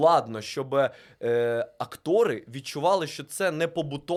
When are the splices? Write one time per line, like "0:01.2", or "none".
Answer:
none